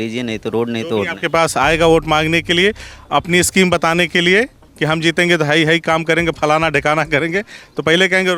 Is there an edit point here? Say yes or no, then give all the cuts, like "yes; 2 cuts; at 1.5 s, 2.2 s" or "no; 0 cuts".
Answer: no; 0 cuts